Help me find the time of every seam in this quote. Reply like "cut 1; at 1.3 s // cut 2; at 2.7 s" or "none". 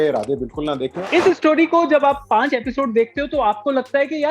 cut 1; at 0.9 s